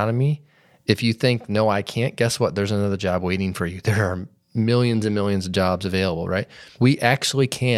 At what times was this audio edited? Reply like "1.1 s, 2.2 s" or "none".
6.6 s